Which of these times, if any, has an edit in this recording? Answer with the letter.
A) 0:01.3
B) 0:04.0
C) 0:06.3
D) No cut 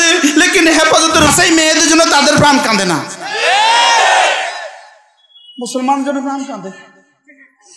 A